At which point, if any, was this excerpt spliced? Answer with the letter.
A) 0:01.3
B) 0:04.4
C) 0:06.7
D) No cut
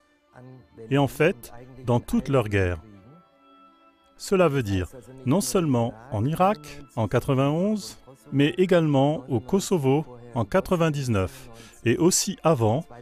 B